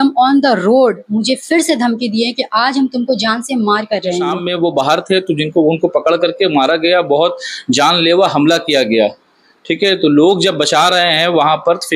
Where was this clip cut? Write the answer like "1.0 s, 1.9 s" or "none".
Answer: 4.4 s